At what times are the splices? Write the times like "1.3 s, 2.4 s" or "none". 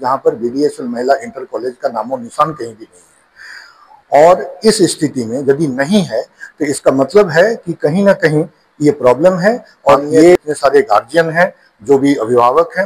10.4 s